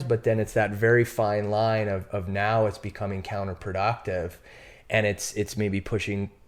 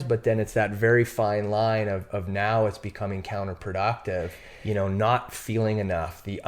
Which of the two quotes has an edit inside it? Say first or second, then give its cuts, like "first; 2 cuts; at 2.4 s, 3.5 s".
second; 1 cut; at 4.5 s